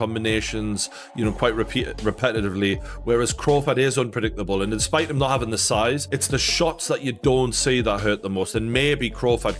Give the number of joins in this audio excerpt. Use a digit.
0